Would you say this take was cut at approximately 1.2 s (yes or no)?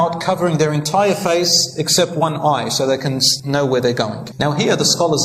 no